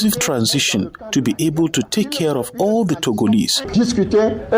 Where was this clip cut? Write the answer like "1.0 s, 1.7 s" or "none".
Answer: 3.6 s